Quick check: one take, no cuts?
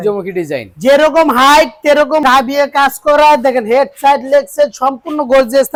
yes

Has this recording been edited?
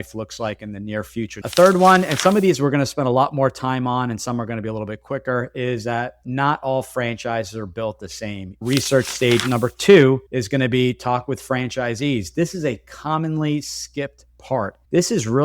yes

